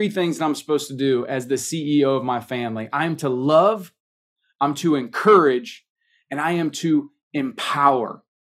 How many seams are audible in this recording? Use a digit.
0